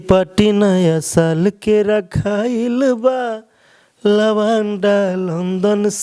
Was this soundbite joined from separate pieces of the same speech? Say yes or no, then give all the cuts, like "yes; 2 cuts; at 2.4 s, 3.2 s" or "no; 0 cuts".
no; 0 cuts